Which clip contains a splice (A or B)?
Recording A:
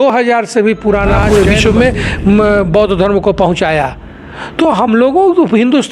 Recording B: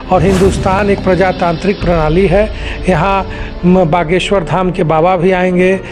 A